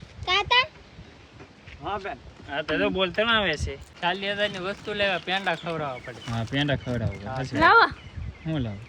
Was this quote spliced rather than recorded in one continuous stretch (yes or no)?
yes